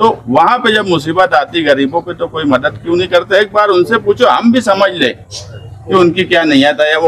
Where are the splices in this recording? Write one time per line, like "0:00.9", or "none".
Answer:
none